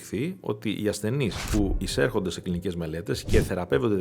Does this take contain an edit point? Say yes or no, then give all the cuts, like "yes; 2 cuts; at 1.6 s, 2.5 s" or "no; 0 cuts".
yes; 1 cut; at 1.8 s